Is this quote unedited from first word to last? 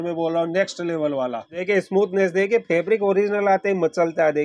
no; 1 cut; at 1.6 s

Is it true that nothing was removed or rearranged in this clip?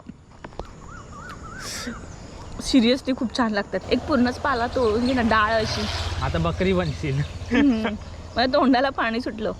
no; 1 cut; at 3.8 s

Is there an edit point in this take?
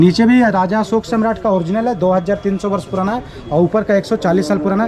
no; 0 cuts

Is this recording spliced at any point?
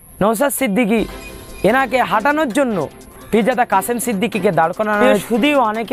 yes; 1 cut; at 5.0 s

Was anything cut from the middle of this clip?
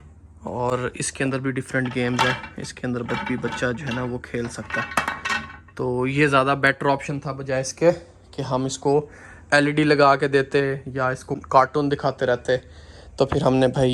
no; 0 cuts

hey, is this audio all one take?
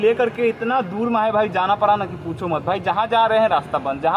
yes; 0 cuts

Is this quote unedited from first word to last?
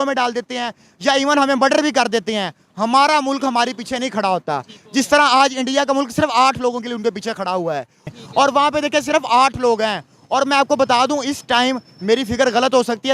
no; 1 cut; at 8.0 s

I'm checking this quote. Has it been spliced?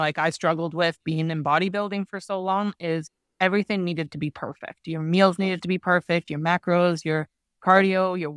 no; 0 cuts

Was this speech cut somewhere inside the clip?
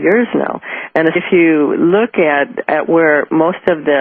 no; 0 cuts

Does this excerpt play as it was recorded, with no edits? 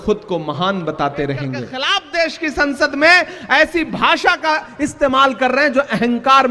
no; 1 cut; at 1.7 s

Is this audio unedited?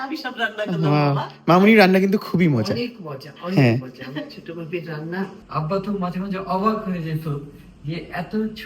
no; 1 cut; at 5.4 s

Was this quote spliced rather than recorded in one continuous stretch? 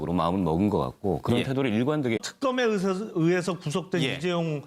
no; 0 cuts

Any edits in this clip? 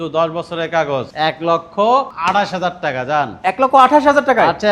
no; 0 cuts

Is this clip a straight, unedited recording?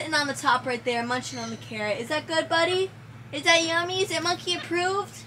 yes; 0 cuts

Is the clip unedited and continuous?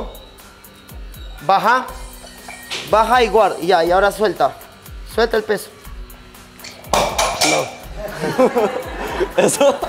yes; 0 cuts

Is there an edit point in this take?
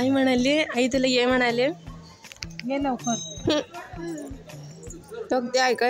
no; 0 cuts

